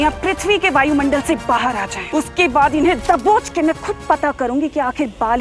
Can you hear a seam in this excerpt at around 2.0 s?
yes; 1 cut; at 2.0 s

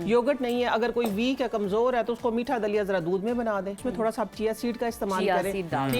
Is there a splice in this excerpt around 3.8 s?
yes; 1 cut; at 3.8 s

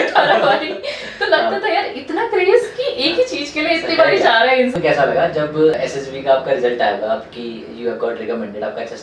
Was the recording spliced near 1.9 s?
no; 2 cuts; at 4.7 s, 5.8 s

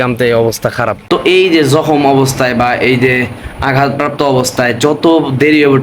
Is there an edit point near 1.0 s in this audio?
yes; 1 cut; at 1.0 s

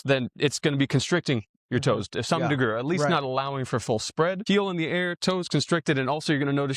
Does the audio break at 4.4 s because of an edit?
yes; 1 cut; at 4.4 s

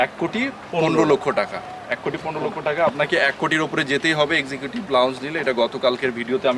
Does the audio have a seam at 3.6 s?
no; 0 cuts

